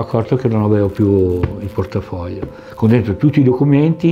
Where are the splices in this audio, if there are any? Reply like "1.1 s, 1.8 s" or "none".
2.6 s